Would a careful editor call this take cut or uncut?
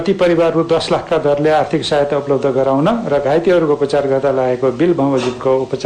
uncut